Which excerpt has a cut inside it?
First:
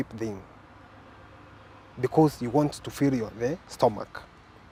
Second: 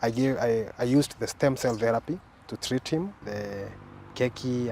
second; 1 cut; at 3.3 s

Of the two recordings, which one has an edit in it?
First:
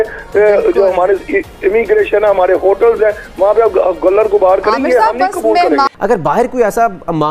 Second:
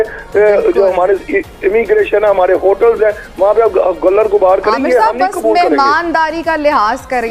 first; 1 cut; at 5.9 s

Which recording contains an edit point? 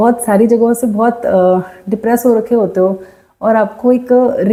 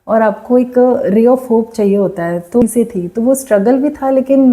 second; 1 cut; at 2.6 s

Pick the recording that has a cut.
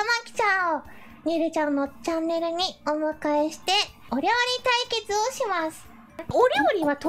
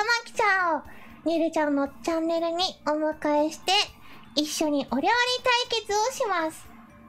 first; 2 cuts; at 4.1 s, 6.3 s

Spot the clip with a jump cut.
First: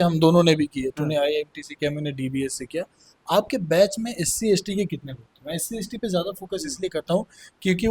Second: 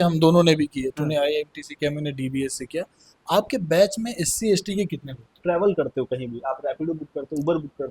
second; 1 cut; at 5.4 s

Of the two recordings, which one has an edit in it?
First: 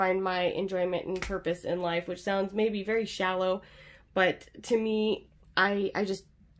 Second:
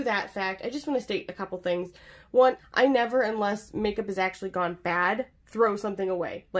second; 1 cut; at 2.6 s

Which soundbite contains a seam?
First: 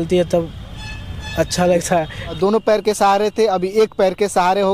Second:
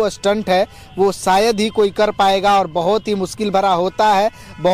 first; 1 cut; at 2.4 s

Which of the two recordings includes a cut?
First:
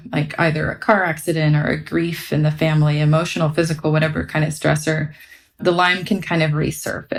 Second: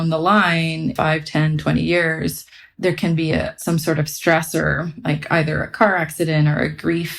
second; 3 cuts; at 0.9 s, 2.7 s, 3.5 s

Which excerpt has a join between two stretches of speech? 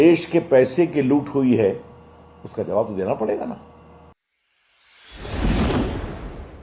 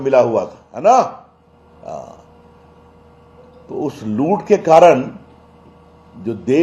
first; 1 cut; at 4.1 s

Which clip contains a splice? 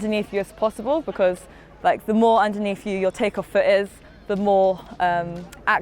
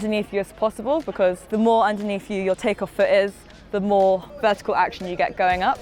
second; 2 cuts; at 1.5 s, 4.3 s

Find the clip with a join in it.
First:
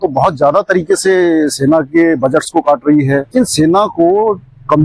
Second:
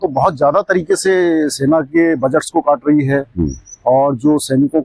first; 1 cut; at 3.3 s

